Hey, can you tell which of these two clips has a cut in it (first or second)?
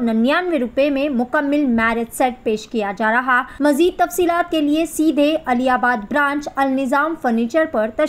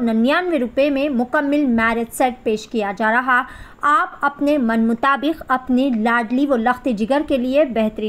first